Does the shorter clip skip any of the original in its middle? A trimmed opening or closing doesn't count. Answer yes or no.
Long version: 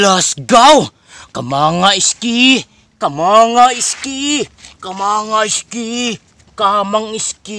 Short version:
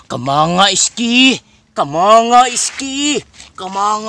no